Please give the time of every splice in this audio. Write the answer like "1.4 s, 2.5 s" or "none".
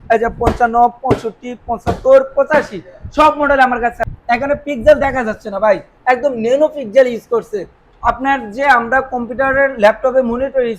4.0 s